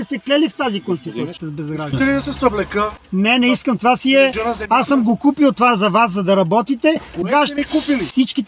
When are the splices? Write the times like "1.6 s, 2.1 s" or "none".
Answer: 1.4 s

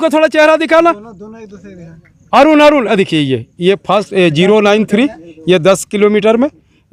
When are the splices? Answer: none

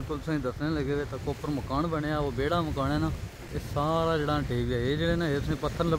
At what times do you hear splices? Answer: 3.6 s

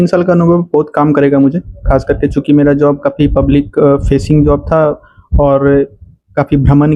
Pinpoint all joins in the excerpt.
none

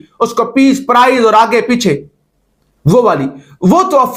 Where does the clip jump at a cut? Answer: none

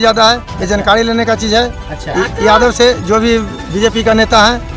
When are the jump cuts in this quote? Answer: none

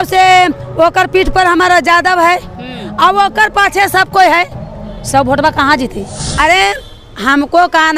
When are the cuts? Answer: 6.4 s

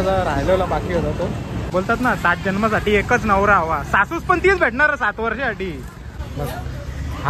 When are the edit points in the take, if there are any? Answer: 1.6 s, 6.2 s

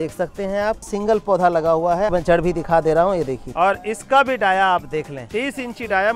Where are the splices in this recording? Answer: 0.9 s, 2.1 s, 3.4 s, 5.2 s

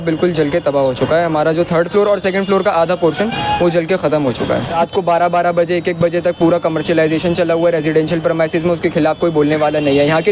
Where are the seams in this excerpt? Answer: 4.8 s

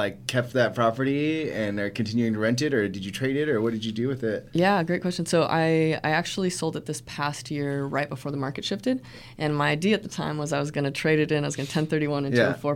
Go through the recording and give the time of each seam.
none

